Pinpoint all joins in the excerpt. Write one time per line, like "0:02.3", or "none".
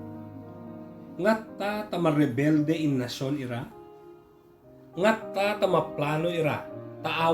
0:01.1